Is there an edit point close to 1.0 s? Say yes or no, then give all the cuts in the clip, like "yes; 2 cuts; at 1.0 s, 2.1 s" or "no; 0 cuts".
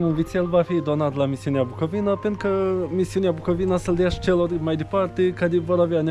no; 0 cuts